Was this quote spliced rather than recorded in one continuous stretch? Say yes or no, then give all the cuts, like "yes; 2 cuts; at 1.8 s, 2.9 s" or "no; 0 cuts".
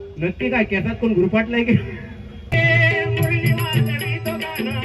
yes; 1 cut; at 2.6 s